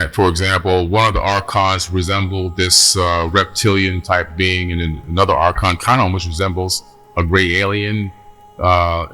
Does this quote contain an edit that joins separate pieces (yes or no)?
no